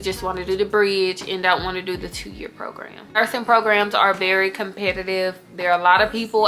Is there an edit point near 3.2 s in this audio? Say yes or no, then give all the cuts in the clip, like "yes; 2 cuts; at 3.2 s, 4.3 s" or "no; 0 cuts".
yes; 1 cut; at 3.2 s